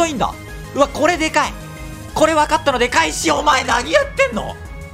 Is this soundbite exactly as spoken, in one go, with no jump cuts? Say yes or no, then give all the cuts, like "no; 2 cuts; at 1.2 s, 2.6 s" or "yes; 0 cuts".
yes; 0 cuts